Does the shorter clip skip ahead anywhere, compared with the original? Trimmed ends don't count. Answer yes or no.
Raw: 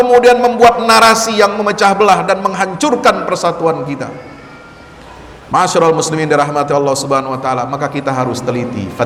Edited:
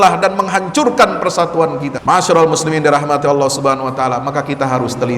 yes